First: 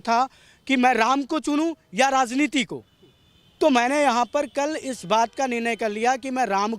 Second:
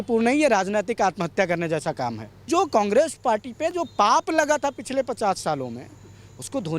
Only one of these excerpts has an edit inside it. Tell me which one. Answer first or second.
second